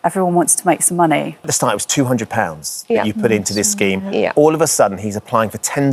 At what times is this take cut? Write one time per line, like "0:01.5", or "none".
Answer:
0:01.5